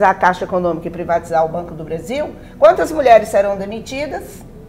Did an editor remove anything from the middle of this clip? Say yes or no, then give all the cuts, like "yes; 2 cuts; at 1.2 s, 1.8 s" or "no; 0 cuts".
no; 0 cuts